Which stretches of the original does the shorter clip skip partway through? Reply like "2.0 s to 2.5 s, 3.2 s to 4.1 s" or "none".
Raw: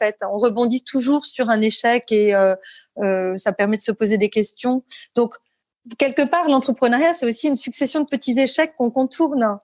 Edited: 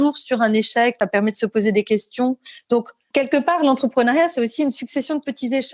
2.0 s to 3.4 s, 5.4 s to 5.8 s